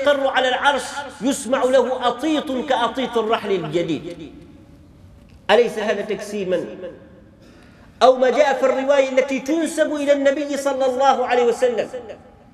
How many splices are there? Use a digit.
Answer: 0